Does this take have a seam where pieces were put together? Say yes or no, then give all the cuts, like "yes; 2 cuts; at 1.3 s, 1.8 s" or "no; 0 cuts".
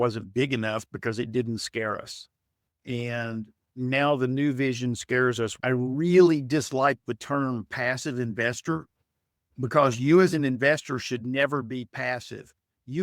yes; 1 cut; at 5.5 s